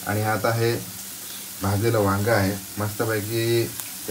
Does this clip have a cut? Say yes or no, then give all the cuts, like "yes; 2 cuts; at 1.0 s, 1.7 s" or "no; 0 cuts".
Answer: no; 0 cuts